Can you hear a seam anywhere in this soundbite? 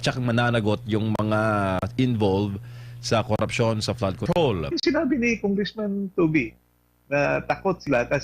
yes; 1 cut; at 4.7 s

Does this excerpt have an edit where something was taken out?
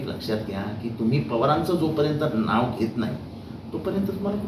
no; 0 cuts

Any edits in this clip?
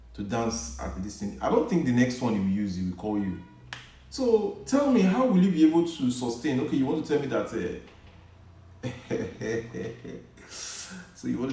no; 0 cuts

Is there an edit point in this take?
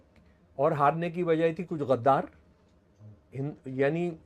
no; 0 cuts

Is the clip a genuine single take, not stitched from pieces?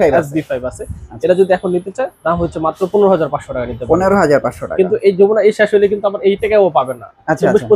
yes; 0 cuts

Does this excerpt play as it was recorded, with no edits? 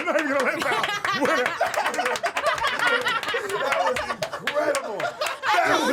yes; 0 cuts

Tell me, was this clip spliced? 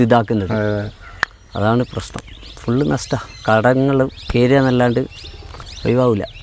no; 0 cuts

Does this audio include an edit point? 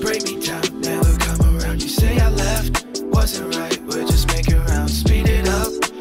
no; 0 cuts

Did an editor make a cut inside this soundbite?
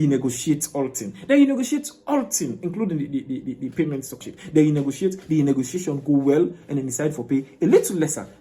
yes; 1 cut; at 4.2 s

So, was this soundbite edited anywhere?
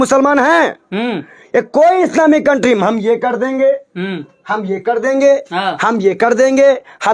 no; 0 cuts

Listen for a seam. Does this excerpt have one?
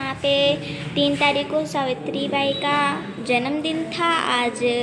no; 0 cuts

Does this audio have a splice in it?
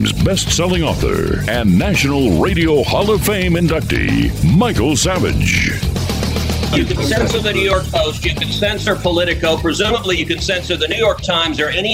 yes; 1 cut; at 6.7 s

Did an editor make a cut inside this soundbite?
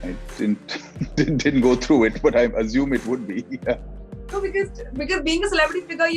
no; 0 cuts

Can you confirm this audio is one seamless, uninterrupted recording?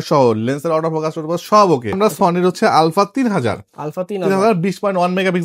no; 1 cut; at 2.0 s

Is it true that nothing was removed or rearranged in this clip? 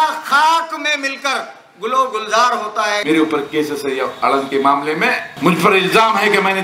no; 2 cuts; at 3.0 s, 5.3 s

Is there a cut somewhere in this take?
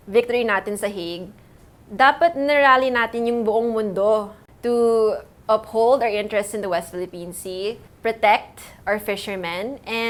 no; 0 cuts

